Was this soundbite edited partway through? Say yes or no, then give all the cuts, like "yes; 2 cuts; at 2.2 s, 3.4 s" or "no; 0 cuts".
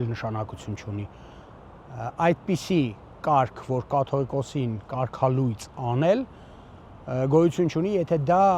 no; 0 cuts